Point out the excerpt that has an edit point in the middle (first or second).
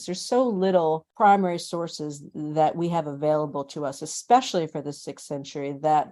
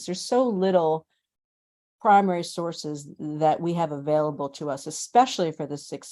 first